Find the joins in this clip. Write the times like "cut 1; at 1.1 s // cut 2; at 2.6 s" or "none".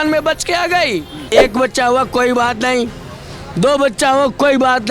cut 1; at 1.2 s